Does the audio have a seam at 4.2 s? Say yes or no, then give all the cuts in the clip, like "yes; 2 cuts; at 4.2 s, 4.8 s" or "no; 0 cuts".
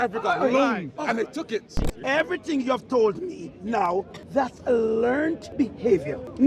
yes; 3 cuts; at 1.9 s, 4.2 s, 5.6 s